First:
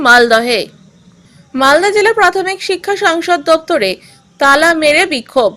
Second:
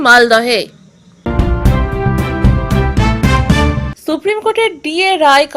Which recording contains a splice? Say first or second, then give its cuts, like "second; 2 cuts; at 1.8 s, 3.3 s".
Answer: second; 2 cuts; at 1.3 s, 3.9 s